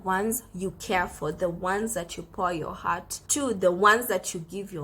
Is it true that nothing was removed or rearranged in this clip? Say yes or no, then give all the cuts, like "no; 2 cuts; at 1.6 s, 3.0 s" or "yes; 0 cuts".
no; 1 cut; at 3.2 s